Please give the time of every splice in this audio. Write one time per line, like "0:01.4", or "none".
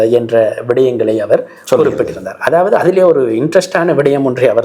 none

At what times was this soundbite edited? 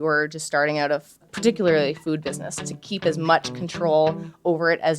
0:01.2

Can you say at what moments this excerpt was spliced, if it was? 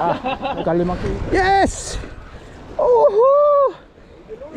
0:01.0

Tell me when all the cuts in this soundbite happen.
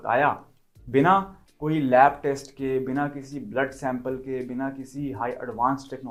none

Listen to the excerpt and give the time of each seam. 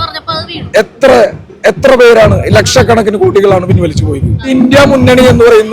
0:04.5

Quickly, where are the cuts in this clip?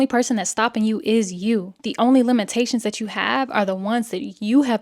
0:01.8

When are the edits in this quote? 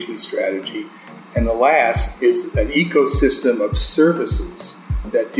0:01.0
0:02.5

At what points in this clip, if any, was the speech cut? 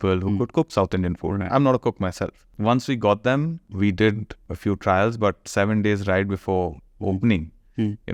0:02.5
0:03.7
0:04.4

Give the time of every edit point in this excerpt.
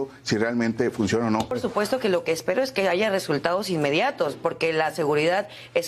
0:01.6

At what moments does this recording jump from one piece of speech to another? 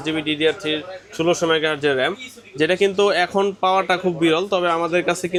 none

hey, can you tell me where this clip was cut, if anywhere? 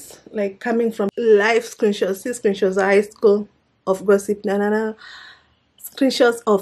0:01.1

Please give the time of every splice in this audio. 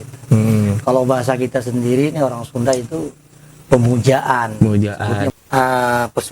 0:05.4

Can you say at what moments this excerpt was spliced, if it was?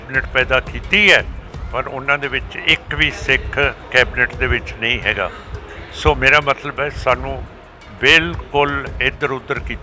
none

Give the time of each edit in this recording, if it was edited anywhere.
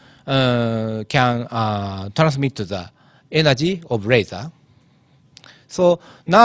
none

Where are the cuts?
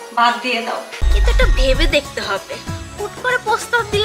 0:00.9

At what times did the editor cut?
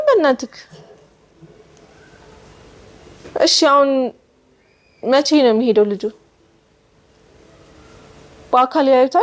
none

